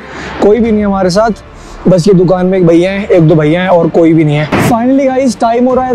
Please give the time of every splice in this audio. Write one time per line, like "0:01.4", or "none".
0:04.5